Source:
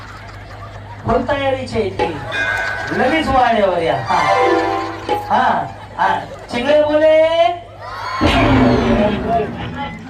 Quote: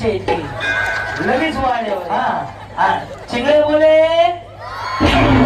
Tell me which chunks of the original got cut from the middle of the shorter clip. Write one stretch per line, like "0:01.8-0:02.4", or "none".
0:03.8-0:05.3